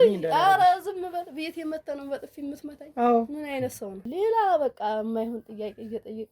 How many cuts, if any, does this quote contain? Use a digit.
1